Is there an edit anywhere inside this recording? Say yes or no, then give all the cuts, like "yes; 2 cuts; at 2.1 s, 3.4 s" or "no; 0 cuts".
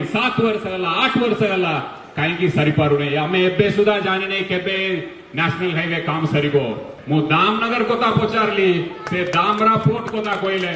yes; 1 cut; at 6.9 s